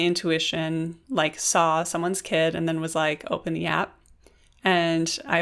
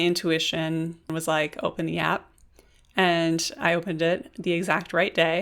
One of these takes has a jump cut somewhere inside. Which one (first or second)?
second